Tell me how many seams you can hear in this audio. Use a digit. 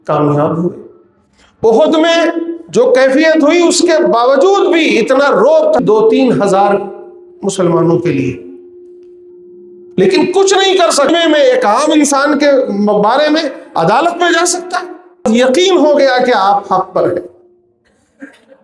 3